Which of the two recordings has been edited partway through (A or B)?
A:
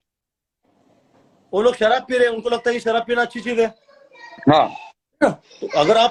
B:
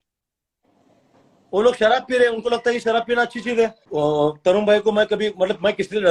B